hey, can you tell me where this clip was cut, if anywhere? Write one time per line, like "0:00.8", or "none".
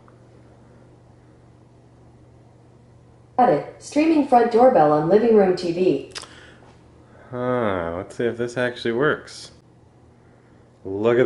0:09.6